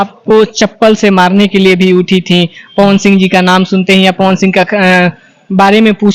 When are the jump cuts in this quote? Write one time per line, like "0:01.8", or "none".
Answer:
none